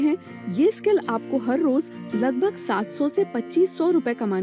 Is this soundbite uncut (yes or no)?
yes